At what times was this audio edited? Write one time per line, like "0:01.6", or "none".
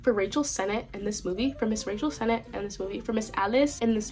none